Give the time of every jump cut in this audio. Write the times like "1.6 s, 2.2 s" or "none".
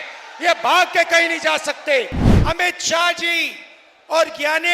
2.2 s